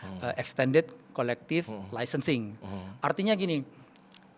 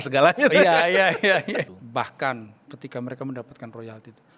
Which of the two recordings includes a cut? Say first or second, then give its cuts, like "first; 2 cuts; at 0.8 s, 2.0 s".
second; 1 cut; at 1.7 s